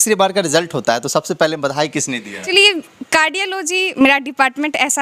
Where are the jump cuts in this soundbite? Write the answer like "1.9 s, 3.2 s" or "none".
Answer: 2.4 s